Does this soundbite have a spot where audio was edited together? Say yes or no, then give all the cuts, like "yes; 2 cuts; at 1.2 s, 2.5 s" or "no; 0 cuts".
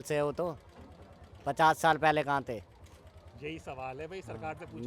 no; 0 cuts